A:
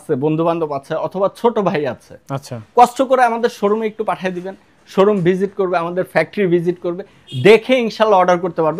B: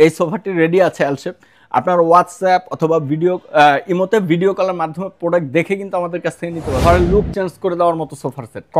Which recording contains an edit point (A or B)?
B